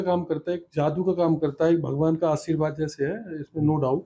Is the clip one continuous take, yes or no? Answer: yes